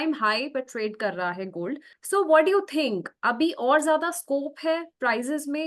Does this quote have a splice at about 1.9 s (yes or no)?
yes